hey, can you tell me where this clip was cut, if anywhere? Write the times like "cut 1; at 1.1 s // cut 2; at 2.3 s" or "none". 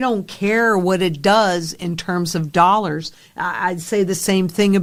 none